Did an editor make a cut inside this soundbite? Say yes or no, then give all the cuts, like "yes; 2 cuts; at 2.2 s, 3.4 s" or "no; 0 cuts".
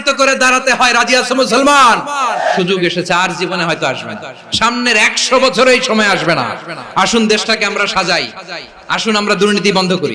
yes; 1 cut; at 2.6 s